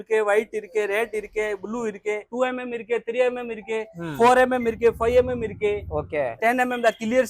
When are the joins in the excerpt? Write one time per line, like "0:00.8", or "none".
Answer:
0:02.3
0:06.3